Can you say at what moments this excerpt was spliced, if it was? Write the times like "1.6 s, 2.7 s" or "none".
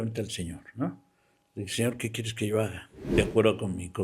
3.0 s